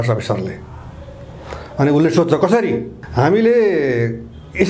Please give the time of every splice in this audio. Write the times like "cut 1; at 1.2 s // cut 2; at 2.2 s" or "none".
cut 1; at 3.0 s